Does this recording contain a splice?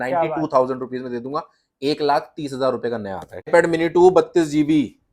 yes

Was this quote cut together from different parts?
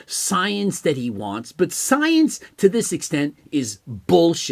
no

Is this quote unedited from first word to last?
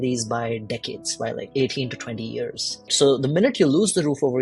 no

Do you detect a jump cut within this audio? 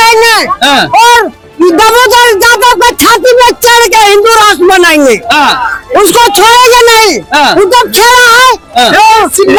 no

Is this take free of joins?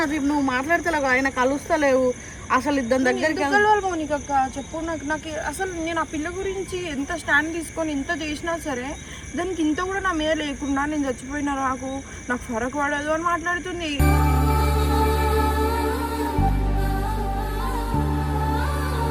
yes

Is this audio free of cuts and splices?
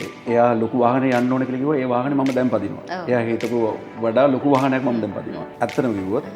no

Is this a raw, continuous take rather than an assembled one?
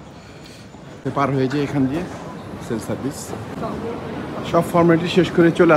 no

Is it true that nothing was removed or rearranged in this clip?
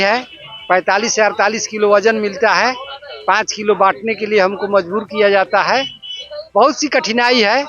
yes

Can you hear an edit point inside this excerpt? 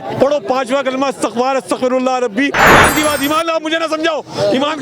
yes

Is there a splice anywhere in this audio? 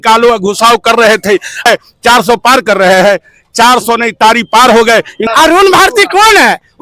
yes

